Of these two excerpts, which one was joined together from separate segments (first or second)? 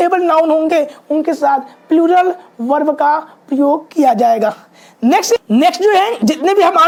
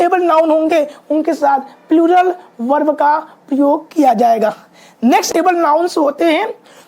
second